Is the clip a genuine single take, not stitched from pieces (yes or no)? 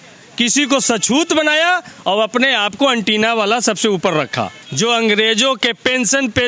no